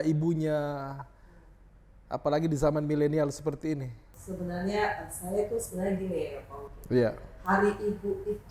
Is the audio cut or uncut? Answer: uncut